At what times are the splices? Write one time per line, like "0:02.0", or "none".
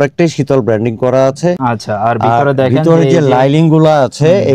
none